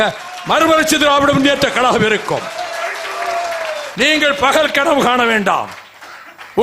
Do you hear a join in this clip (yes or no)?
yes